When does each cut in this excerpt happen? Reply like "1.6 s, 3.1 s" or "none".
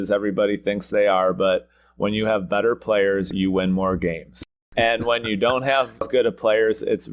3.3 s, 4.6 s, 6.0 s